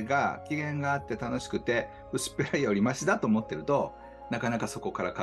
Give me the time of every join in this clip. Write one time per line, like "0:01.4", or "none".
none